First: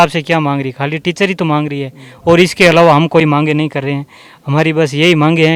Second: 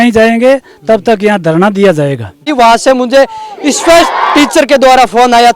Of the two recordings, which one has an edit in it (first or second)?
second